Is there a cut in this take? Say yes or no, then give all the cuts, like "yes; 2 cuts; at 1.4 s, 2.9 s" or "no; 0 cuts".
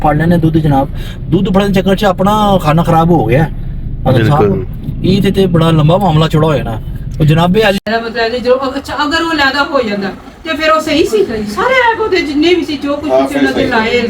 yes; 1 cut; at 7.8 s